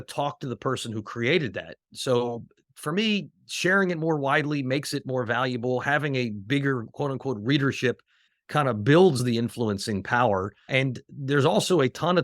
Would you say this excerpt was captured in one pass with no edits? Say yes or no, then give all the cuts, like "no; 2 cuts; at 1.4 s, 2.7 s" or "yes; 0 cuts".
no; 4 cuts; at 1.9 s, 8.3 s, 9.2 s, 10.7 s